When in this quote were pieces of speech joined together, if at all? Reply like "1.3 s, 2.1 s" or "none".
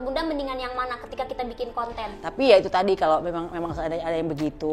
2.2 s

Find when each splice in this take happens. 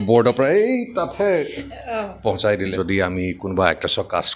2.7 s

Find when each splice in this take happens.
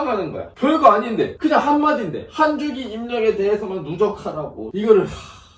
1.3 s, 4.6 s

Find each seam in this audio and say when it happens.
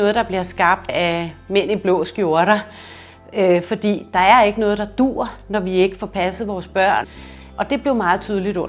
0.9 s, 7.1 s

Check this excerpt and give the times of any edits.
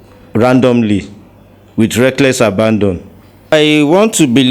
3.5 s

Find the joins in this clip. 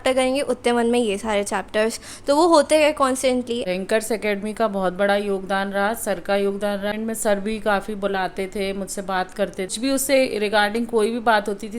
3.6 s, 6.9 s, 9.7 s

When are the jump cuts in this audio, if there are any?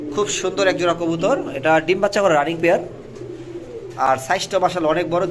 none

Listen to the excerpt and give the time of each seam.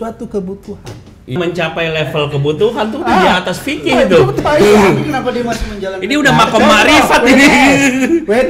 1.4 s

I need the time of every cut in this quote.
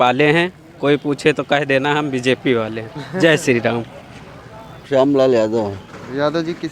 none

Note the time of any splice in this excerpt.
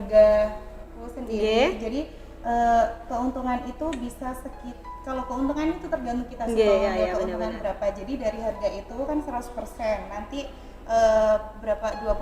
none

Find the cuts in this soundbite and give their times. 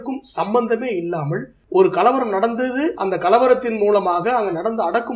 1.5 s

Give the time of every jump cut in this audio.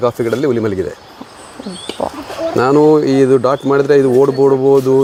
none

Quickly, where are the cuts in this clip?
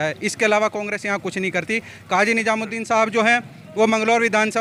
none

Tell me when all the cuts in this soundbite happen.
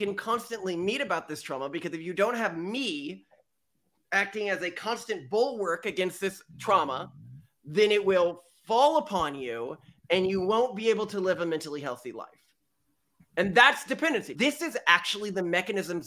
14.3 s

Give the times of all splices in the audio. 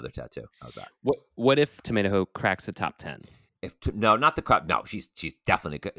1.7 s

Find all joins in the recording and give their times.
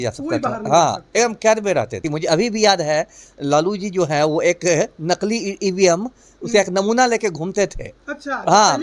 2.0 s

